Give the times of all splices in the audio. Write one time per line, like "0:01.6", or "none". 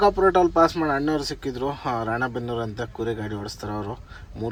none